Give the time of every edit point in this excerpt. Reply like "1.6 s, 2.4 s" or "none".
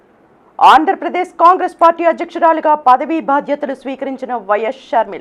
none